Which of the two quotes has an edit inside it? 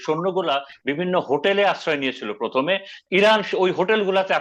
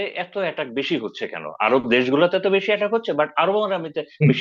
first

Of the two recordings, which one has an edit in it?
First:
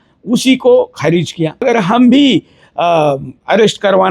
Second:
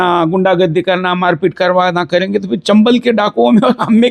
first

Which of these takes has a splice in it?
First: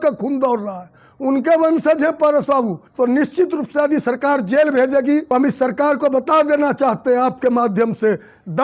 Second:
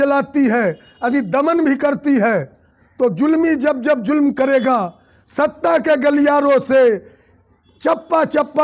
first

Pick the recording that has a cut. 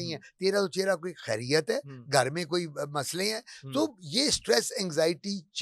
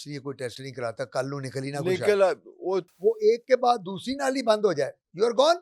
second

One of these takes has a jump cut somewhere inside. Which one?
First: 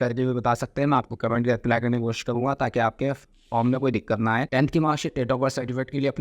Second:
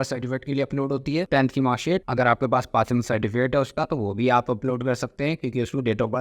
first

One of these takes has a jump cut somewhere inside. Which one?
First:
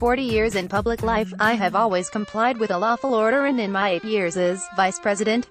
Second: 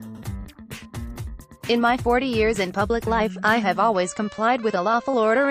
second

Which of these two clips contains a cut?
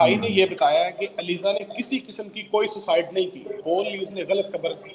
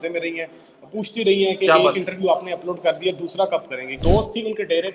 second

